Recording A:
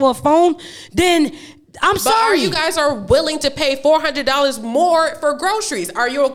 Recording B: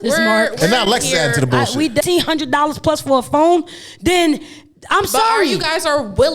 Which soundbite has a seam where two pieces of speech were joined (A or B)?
B